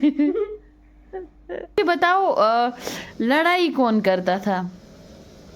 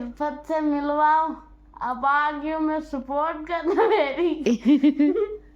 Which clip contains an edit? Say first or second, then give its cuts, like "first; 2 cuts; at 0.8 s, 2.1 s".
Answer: first; 1 cut; at 1.8 s